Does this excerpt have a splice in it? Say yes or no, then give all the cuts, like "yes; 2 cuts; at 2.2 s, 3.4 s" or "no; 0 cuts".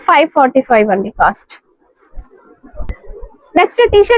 no; 0 cuts